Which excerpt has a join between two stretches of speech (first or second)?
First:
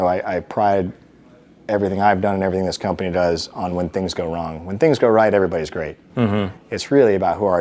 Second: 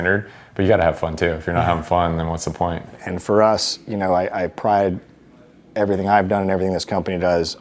second